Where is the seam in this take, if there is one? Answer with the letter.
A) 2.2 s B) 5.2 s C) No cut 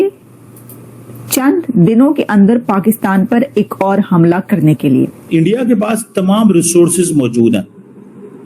B